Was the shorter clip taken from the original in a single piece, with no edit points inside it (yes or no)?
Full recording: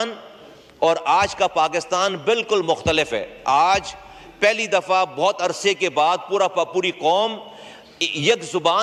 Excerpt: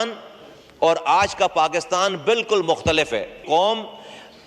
no